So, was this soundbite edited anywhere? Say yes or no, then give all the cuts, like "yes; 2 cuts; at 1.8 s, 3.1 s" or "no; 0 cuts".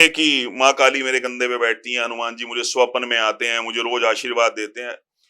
no; 0 cuts